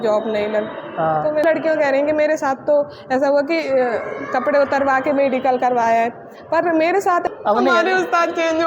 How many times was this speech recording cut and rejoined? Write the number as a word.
two